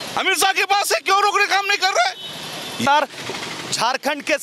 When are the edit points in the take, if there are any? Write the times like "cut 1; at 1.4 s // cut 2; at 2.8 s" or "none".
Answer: cut 1; at 2.8 s